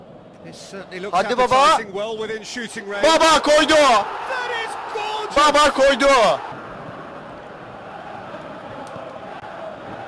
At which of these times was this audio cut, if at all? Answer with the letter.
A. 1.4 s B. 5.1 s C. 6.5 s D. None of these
C